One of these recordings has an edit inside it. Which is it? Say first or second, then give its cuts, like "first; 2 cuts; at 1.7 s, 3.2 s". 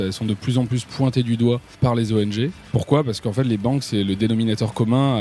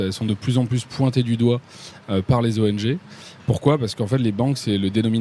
first; 2 cuts; at 1.8 s, 2.6 s